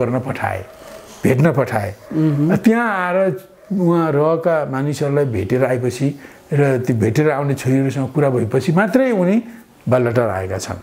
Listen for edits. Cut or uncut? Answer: uncut